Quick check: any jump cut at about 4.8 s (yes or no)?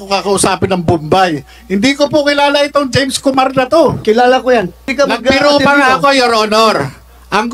yes